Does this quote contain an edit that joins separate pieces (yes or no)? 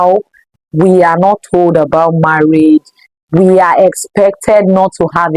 no